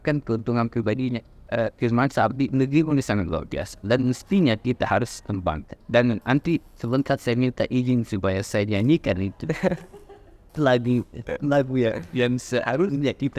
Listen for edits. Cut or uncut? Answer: cut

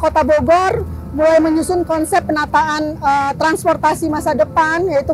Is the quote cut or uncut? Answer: uncut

